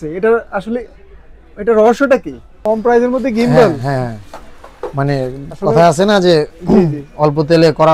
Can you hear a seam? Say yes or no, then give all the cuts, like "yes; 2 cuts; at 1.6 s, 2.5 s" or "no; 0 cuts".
yes; 1 cut; at 2.6 s